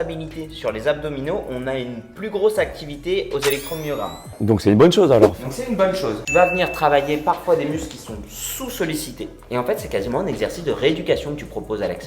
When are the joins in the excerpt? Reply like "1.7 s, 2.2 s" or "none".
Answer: 4.2 s, 6.2 s